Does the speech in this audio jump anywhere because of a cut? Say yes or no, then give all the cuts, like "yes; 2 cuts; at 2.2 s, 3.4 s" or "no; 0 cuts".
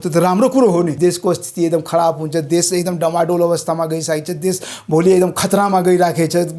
yes; 1 cut; at 0.9 s